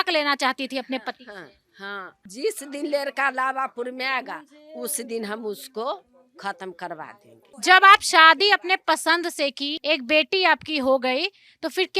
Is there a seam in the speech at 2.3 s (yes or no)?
yes